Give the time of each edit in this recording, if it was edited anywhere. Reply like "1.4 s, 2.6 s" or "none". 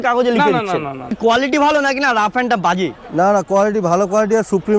1.2 s

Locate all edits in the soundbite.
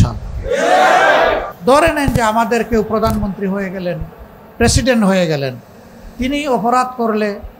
1.5 s

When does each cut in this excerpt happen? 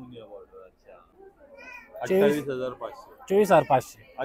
1.2 s

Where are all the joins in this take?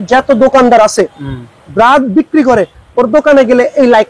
none

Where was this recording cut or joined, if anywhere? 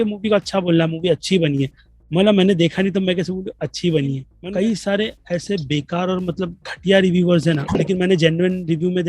4.3 s, 7.7 s

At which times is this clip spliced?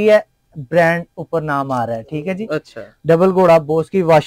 none

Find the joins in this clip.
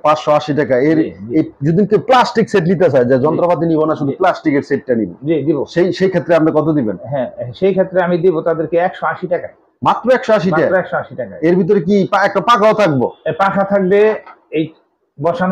none

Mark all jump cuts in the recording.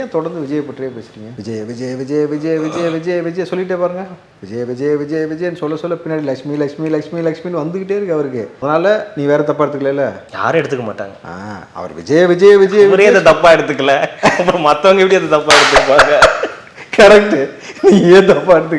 none

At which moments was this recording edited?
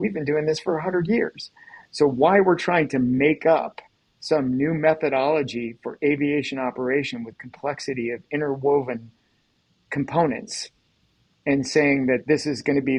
none

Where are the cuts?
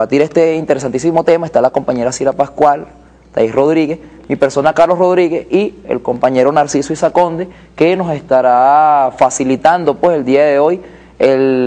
10.7 s

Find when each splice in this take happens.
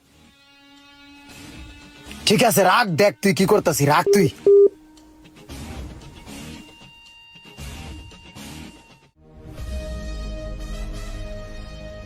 none

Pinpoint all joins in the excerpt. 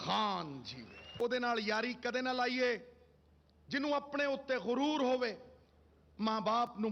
1.2 s

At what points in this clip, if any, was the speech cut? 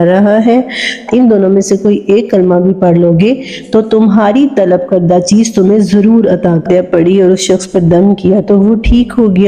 1.1 s, 6.6 s

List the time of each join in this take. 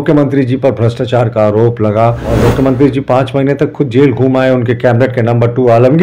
2.3 s

